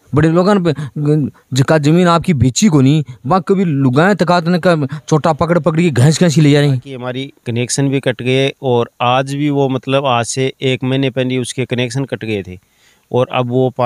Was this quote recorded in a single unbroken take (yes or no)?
no